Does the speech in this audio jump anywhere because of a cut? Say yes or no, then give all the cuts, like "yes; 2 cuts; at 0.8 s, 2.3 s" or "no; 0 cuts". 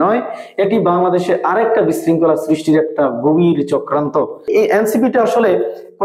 yes; 1 cut; at 4.5 s